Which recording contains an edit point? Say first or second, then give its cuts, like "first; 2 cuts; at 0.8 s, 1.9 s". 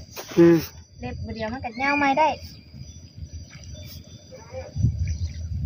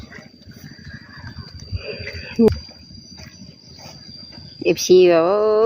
second; 1 cut; at 2.5 s